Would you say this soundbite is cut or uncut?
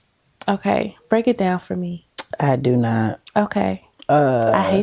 uncut